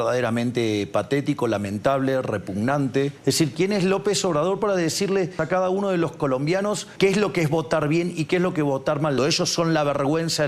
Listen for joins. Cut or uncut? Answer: cut